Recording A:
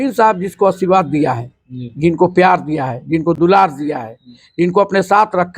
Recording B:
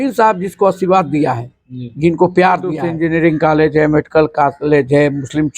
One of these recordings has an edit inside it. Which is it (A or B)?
B